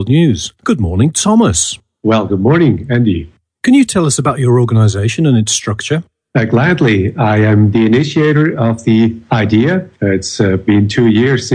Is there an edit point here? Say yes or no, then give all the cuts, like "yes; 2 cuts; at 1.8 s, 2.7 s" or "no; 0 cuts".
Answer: yes; 1 cut; at 9.9 s